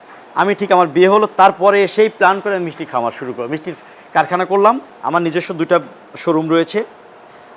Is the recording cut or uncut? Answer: uncut